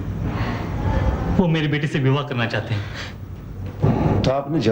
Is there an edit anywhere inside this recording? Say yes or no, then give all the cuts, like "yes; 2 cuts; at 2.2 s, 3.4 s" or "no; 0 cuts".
no; 0 cuts